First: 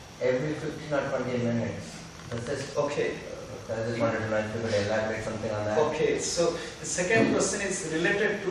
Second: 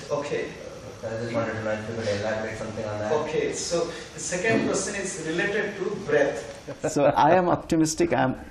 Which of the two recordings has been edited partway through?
second; 1 cut; at 6.8 s

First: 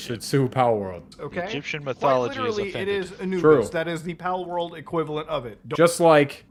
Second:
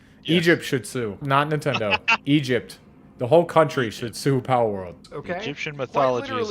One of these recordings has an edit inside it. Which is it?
second; 1 cut; at 1.2 s

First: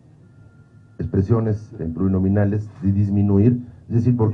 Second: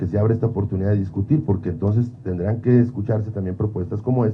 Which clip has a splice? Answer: first; 1 cut; at 1.9 s

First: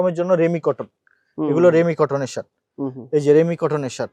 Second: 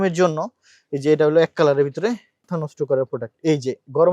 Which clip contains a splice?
second; 1 cut; at 2.5 s

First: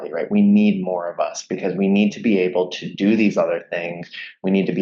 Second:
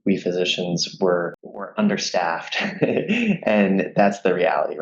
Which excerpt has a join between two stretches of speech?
second; 1 cut; at 1.7 s

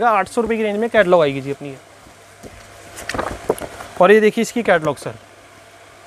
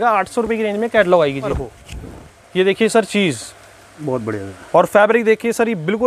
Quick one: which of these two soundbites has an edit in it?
second; 1 cut; at 1.6 s

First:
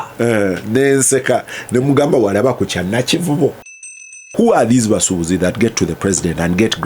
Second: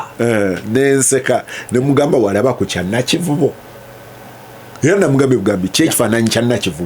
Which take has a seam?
first; 1 cut; at 4.2 s

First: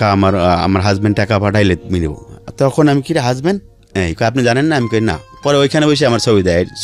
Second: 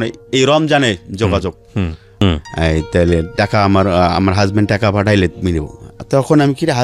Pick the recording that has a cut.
second; 1 cut; at 2.2 s

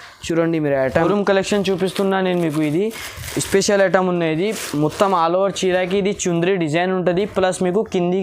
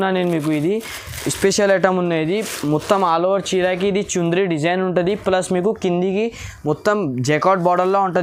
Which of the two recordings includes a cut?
first; 1 cut; at 0.9 s

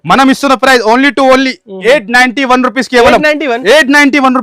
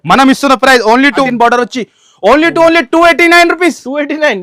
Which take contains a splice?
second; 1 cut; at 1.2 s

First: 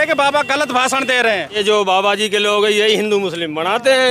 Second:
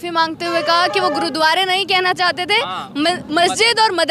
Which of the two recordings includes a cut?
first; 1 cut; at 1.6 s

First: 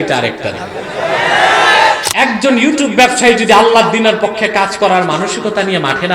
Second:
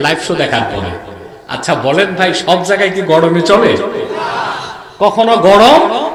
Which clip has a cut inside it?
first; 1 cut; at 2.0 s

